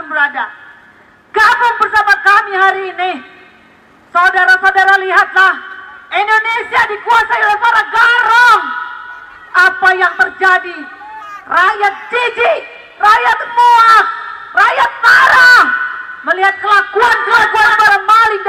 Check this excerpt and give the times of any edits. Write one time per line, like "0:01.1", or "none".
none